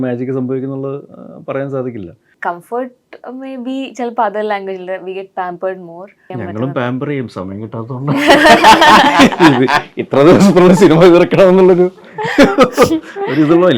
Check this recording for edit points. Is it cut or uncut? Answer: cut